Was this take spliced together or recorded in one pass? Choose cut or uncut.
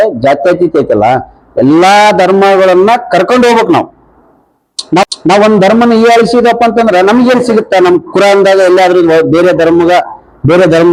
uncut